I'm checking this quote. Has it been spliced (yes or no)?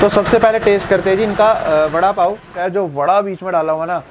yes